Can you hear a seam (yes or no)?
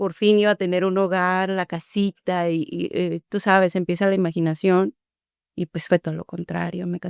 no